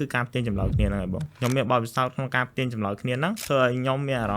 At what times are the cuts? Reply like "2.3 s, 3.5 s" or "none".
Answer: 1.3 s, 3.4 s

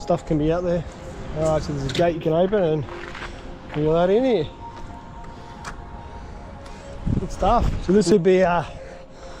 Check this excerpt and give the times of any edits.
1.5 s, 7.8 s

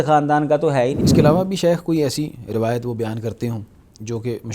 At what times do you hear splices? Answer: 1.0 s

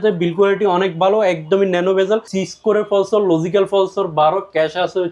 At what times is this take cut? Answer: 2.4 s

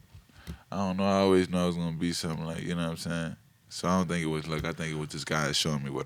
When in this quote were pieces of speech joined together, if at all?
none

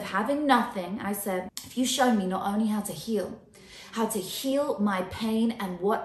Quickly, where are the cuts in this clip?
1.6 s

